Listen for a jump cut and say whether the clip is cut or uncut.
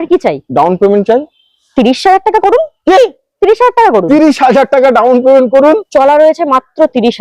cut